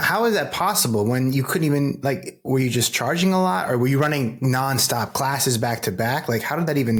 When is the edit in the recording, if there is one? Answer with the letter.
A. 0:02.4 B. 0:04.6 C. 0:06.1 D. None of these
D